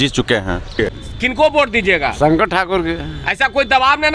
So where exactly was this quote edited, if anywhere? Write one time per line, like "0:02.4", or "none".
0:01.1